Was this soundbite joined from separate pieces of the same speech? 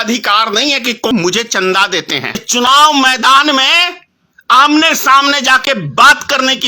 yes; 2 cuts; at 1.1 s, 2.5 s

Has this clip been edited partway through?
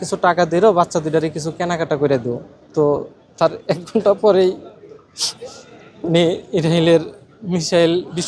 no; 0 cuts

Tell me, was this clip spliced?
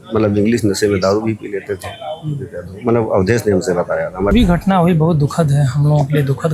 yes; 1 cut; at 4.3 s

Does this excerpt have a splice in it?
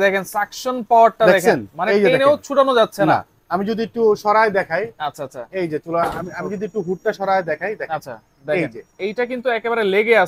no; 0 cuts

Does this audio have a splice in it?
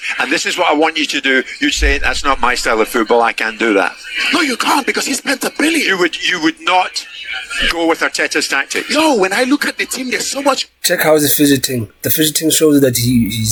no; 0 cuts

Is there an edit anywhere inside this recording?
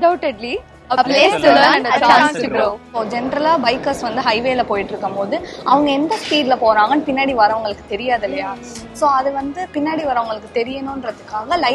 yes; 1 cut; at 2.9 s

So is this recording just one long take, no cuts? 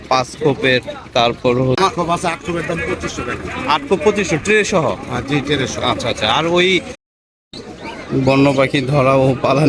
no; 2 cuts; at 1.8 s, 7.0 s

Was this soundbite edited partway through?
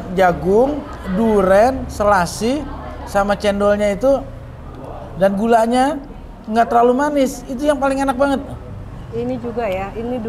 no; 0 cuts

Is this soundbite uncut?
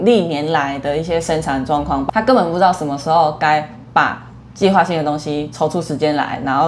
no; 1 cut; at 2.0 s

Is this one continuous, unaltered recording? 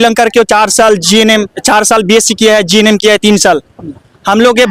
yes; 0 cuts

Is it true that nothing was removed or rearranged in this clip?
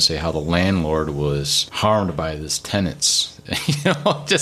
no; 1 cut; at 1.6 s

